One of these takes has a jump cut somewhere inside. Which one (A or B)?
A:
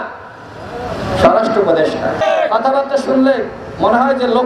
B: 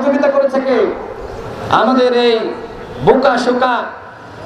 A